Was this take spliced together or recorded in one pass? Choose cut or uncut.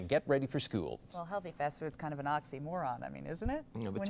cut